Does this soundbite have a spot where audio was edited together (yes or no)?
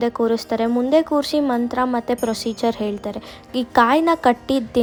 no